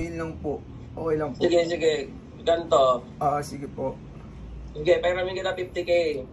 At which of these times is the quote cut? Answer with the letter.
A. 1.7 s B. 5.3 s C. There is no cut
C